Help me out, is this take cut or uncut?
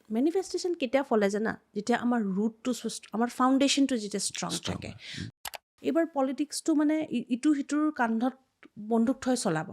cut